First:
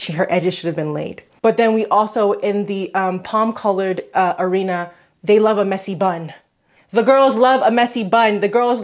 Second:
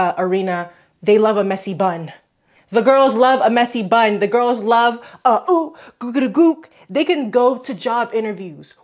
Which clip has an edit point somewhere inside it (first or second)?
first